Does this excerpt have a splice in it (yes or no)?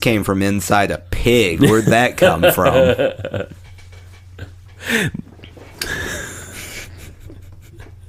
no